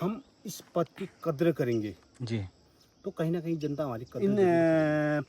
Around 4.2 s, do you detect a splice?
yes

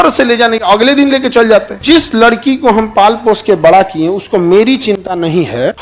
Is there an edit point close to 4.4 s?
no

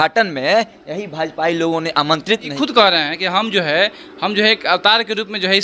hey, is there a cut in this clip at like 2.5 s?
yes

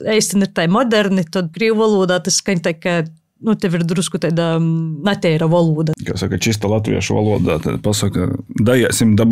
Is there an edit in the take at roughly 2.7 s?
no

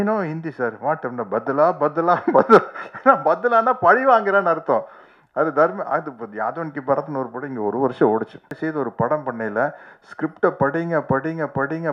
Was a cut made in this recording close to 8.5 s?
yes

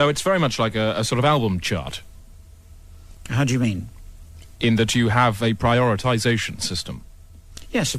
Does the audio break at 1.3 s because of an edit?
yes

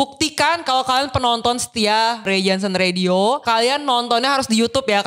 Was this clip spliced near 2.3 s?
yes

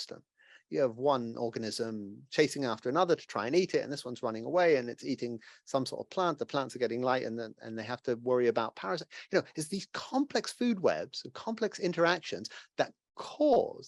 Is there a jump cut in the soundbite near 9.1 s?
no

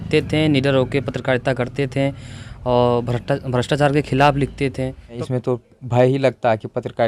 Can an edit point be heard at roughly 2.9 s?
no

